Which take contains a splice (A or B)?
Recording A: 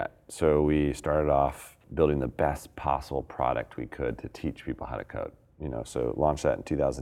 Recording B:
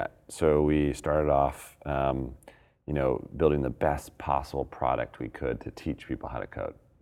A